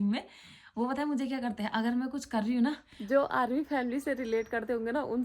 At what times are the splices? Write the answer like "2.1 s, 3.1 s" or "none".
2.9 s